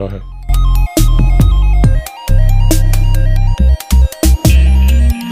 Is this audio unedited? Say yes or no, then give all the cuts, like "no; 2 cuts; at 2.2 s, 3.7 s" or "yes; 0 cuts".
no; 1 cut; at 2.0 s